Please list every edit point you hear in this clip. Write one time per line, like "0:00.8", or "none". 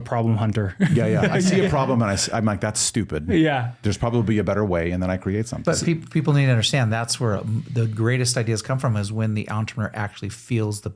none